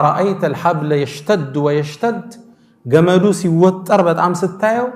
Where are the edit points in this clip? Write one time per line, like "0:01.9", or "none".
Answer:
none